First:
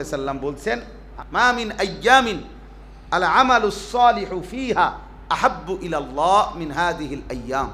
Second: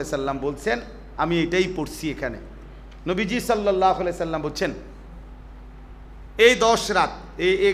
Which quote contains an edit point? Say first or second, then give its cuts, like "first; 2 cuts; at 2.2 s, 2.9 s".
first; 1 cut; at 1.0 s